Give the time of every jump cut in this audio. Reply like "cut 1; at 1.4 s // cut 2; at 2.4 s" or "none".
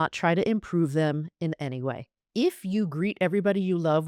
cut 1; at 2.1 s

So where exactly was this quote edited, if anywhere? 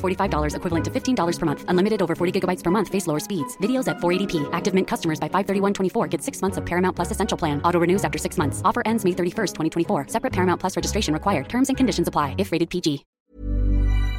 cut 1; at 13.1 s

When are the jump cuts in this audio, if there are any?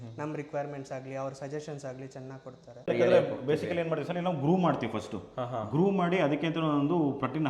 cut 1; at 2.9 s

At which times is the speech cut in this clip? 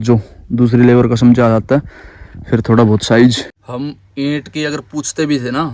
cut 1; at 3.5 s

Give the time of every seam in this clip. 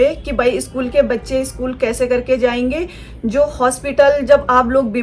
none

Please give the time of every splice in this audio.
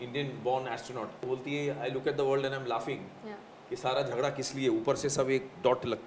cut 1; at 1.2 s

